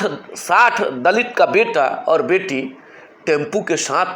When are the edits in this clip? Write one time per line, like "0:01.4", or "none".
none